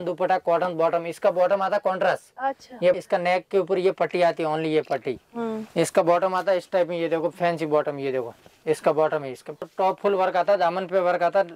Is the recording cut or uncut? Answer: cut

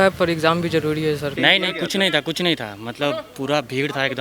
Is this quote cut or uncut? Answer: cut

